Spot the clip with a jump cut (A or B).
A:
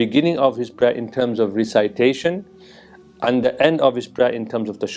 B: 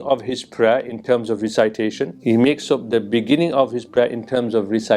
B